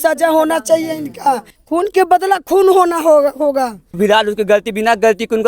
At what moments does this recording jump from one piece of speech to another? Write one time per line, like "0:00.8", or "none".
0:01.5
0:03.8